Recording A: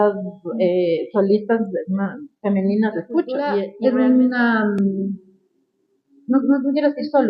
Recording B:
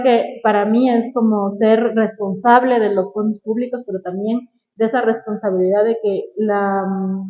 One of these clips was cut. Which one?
A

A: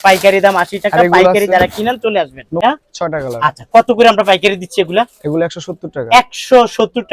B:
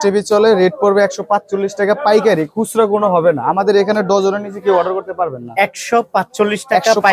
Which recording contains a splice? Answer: A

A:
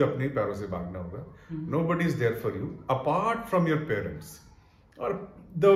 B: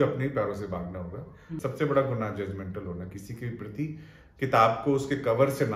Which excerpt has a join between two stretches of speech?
B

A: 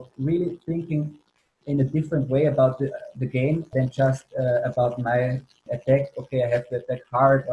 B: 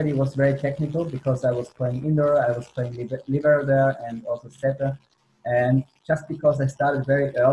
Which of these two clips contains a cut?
A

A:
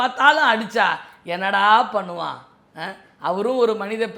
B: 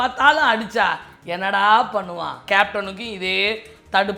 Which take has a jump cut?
B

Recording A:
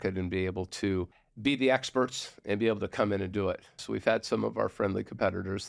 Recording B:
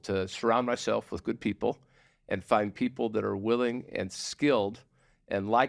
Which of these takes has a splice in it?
A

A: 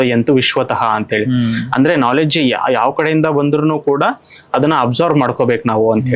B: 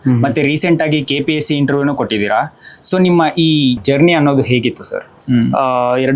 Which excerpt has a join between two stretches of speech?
B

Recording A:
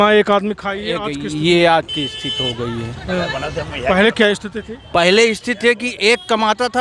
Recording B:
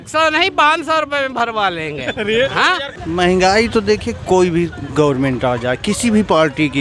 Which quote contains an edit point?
B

